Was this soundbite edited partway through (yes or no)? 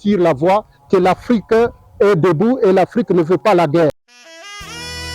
yes